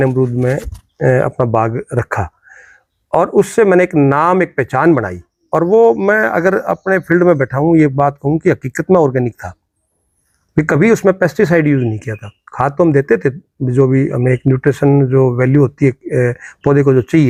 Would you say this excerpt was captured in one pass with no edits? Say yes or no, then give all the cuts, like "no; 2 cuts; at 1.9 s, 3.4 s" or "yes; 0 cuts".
yes; 0 cuts